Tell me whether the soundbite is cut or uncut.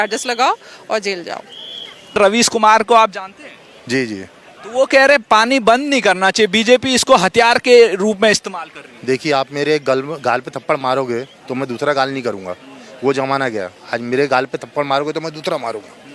cut